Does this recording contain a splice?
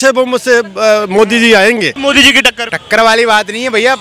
yes; 1 cut; at 1.9 s

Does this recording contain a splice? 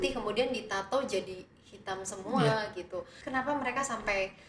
yes; 1 cut; at 3.2 s

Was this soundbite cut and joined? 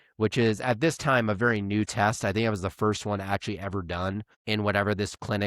yes; 1 cut; at 4.3 s

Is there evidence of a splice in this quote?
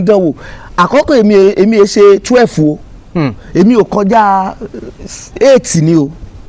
no; 0 cuts

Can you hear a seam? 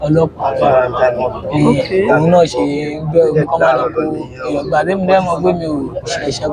no; 0 cuts

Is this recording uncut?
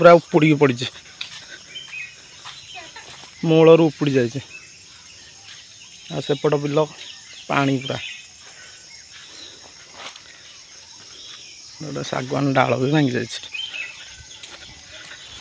yes; 0 cuts

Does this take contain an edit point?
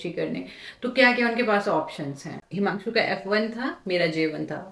yes; 1 cut; at 2.4 s

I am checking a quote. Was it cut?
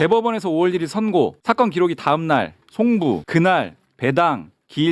yes; 2 cuts; at 1.4 s, 3.2 s

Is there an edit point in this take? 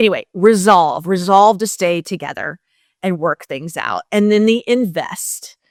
no; 0 cuts

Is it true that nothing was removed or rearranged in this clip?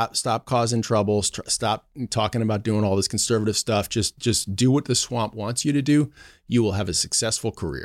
yes; 0 cuts

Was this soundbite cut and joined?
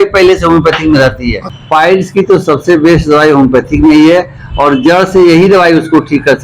yes; 1 cut; at 1.4 s

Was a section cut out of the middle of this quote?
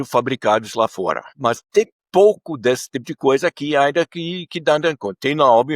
yes; 1 cut; at 1.4 s

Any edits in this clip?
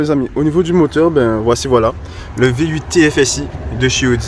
no; 0 cuts

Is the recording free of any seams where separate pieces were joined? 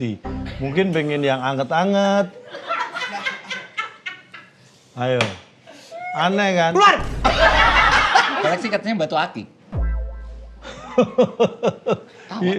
no; 1 cut; at 8.4 s

